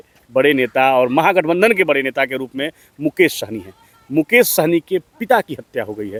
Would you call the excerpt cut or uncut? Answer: uncut